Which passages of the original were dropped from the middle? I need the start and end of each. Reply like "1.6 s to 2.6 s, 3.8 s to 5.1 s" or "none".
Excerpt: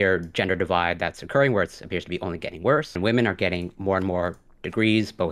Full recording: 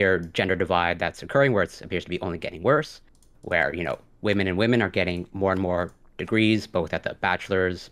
3.0 s to 4.5 s